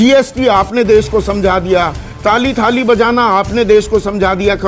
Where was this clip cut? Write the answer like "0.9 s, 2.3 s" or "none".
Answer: none